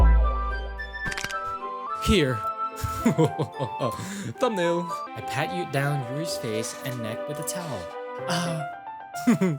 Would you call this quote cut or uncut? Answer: cut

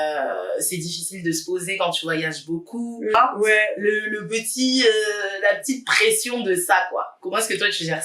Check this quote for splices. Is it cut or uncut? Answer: cut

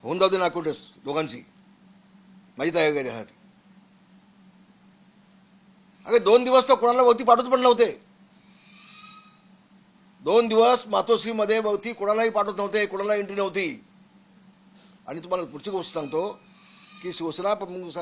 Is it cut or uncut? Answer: uncut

